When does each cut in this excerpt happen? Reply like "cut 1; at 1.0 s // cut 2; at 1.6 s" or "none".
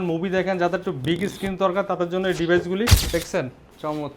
cut 1; at 3.0 s